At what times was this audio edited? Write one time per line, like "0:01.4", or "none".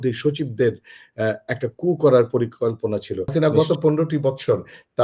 0:03.3